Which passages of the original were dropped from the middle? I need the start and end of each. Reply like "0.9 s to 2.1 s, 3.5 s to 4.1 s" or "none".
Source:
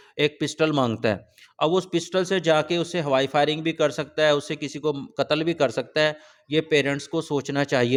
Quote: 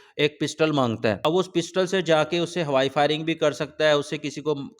1.2 s to 1.6 s